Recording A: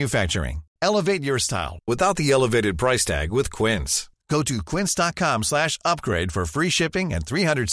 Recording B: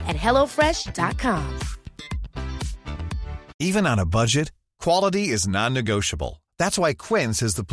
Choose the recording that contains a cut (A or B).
B